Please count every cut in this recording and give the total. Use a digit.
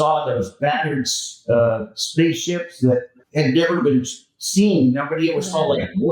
1